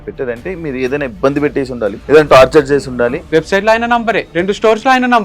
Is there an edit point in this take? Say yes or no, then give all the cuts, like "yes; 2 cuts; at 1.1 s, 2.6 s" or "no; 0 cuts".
yes; 3 cuts; at 2.0 s, 3.2 s, 4.3 s